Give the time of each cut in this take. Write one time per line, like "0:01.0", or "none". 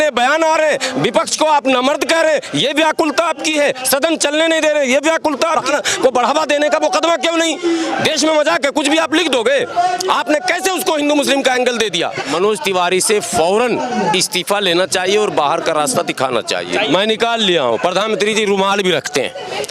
0:05.6
0:12.2
0:16.7